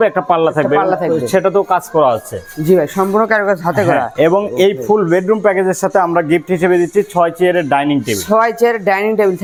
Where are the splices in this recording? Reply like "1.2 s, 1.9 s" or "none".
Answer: none